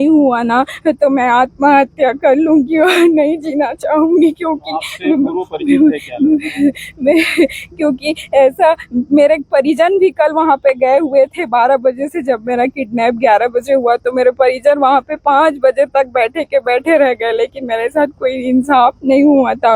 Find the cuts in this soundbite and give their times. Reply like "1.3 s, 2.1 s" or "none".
none